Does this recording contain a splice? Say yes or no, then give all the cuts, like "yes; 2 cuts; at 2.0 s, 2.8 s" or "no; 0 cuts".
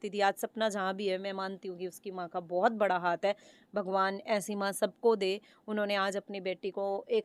no; 0 cuts